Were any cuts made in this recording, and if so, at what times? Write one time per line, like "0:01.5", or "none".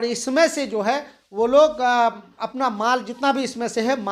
none